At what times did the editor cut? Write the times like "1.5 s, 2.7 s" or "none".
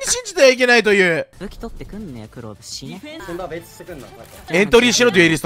1.3 s, 3.2 s, 4.4 s